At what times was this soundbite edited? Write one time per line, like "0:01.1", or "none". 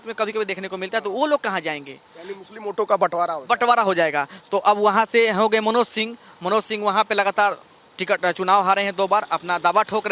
none